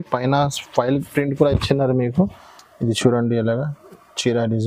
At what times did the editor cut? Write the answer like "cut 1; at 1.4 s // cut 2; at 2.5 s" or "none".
none